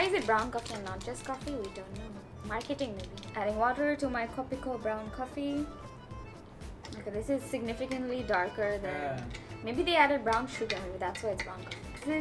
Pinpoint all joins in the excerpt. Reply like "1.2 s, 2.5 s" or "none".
none